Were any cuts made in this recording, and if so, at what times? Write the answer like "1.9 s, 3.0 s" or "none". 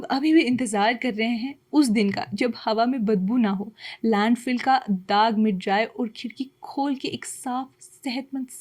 none